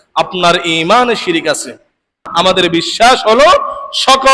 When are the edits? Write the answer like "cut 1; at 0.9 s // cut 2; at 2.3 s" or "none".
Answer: cut 1; at 2.2 s

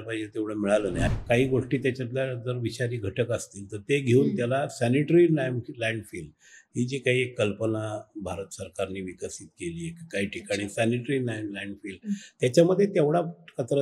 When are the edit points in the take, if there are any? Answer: cut 1; at 1.1 s

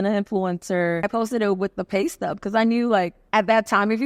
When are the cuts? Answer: cut 1; at 1.1 s // cut 2; at 3.2 s

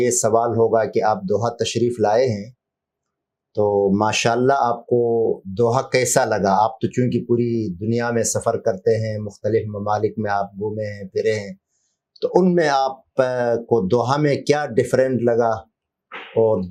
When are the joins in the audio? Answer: none

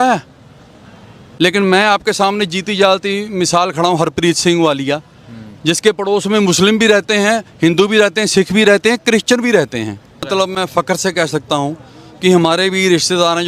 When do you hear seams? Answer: cut 1; at 10.3 s

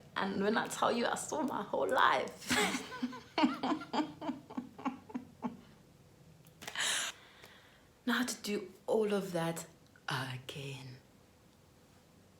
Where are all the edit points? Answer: cut 1; at 7.1 s

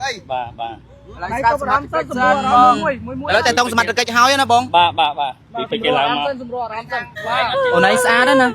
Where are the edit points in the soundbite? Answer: cut 1; at 7.1 s

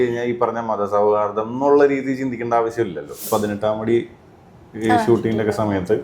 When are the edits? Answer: cut 1; at 3.3 s

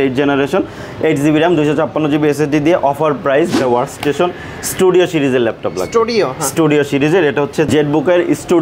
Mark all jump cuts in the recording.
cut 1; at 3.5 s

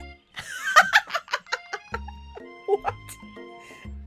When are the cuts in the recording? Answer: none

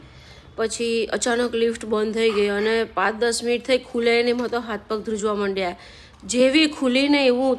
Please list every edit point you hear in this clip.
none

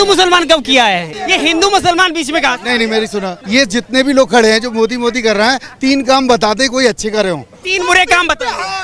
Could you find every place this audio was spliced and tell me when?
cut 1; at 1.1 s // cut 2; at 3.4 s

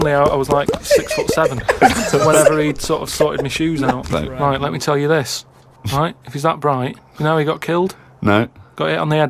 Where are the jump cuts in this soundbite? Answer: cut 1; at 4.0 s

